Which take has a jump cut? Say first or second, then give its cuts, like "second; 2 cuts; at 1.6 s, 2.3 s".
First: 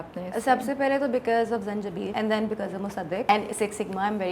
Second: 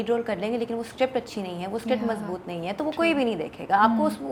first; 2 cuts; at 2.1 s, 3.3 s